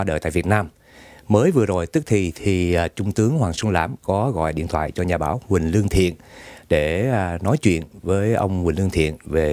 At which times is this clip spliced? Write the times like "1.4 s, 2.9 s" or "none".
3.7 s